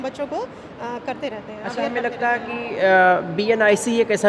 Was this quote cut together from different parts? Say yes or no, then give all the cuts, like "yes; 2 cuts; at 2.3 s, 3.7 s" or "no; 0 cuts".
no; 0 cuts